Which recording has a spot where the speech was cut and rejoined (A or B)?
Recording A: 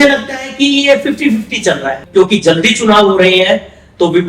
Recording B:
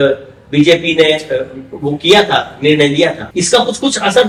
A